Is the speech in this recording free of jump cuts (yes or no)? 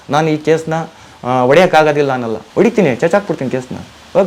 no